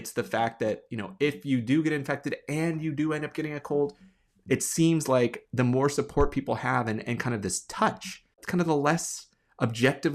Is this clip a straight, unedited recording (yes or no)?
yes